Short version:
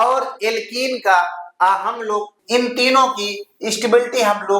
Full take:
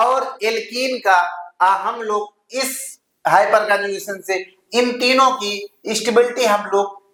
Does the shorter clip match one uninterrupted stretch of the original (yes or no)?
no